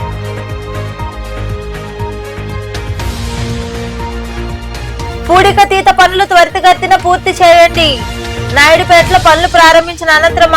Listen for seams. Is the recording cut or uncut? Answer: cut